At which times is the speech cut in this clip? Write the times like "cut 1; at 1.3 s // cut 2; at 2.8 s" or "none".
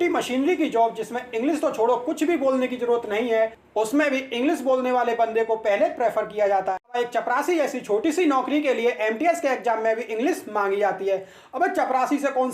cut 1; at 7.0 s